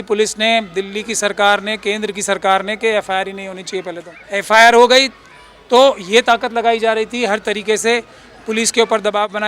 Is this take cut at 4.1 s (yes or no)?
yes